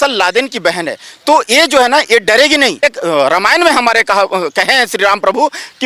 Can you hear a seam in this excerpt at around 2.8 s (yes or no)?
yes